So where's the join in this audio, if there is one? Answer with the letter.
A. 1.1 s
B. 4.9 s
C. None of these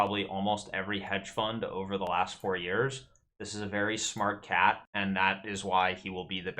B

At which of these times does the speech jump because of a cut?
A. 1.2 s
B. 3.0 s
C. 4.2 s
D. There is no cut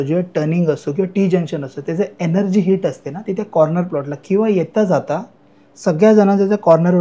D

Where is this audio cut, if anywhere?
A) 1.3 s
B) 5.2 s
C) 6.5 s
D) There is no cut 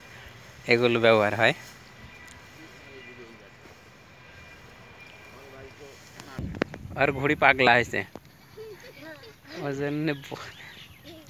C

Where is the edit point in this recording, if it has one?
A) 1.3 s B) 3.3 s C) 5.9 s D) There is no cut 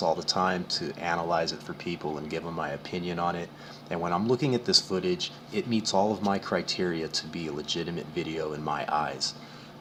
D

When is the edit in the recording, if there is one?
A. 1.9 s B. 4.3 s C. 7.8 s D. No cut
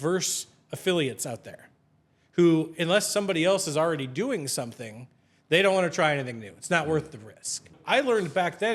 C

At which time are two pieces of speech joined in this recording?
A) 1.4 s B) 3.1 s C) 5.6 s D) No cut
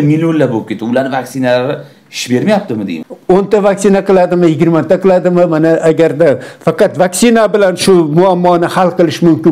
B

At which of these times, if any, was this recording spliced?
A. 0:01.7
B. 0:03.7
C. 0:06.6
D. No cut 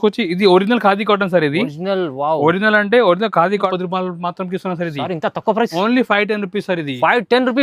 B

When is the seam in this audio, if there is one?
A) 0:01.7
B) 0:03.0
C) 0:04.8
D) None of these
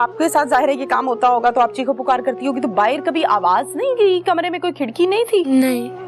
D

